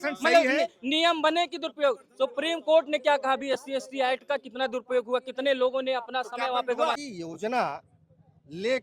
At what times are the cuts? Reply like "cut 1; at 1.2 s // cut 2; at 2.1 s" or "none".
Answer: cut 1; at 7.1 s